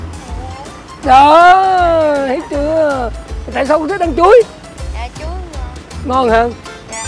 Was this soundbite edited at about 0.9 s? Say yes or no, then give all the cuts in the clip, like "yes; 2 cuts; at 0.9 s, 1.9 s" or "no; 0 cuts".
no; 0 cuts